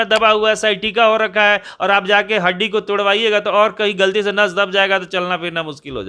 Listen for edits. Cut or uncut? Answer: uncut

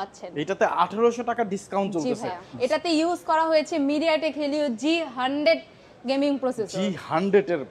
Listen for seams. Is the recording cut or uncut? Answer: cut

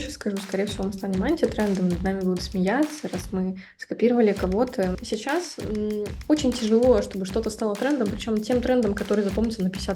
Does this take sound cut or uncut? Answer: cut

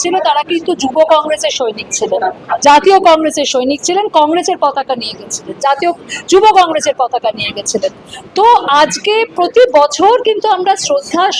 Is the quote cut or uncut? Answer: uncut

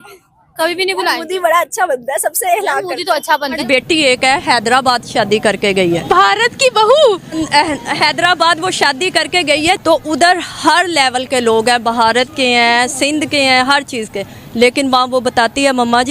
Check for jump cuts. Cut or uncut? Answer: cut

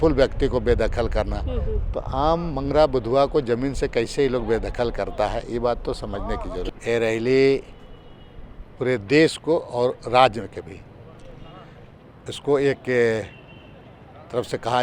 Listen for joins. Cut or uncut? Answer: cut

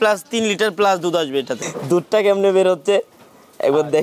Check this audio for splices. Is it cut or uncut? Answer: cut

